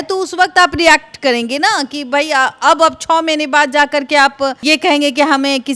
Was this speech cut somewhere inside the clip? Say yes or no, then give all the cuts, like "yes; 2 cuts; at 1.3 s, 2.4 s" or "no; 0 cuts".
no; 0 cuts